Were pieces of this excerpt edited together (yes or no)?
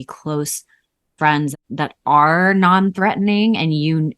yes